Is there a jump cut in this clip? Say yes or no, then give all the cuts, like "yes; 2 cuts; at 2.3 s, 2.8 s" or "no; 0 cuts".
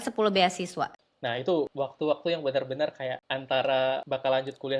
yes; 4 cuts; at 1.1 s, 1.7 s, 3.3 s, 4.0 s